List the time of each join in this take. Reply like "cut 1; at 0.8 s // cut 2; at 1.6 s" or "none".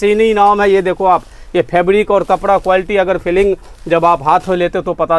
none